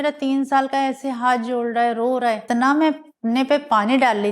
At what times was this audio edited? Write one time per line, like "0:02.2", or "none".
0:02.4